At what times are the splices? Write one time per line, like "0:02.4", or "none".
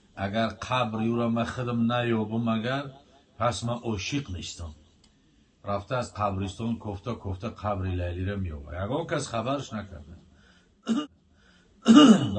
0:11.0